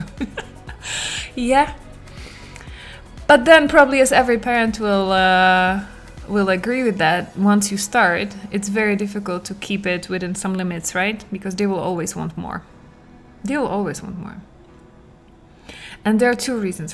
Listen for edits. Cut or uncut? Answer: uncut